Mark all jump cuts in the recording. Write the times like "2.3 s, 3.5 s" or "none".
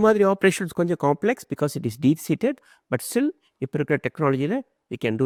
none